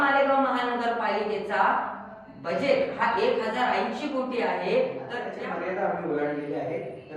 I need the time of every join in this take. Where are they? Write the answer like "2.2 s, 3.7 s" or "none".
5.3 s

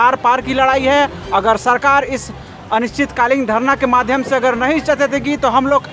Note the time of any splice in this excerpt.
none

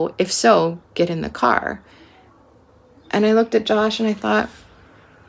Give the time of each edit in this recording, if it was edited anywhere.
none

